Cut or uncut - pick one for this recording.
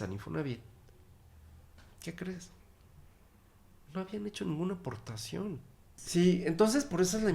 cut